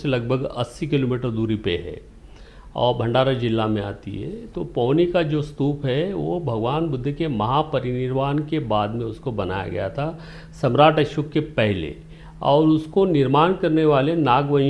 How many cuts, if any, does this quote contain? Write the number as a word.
zero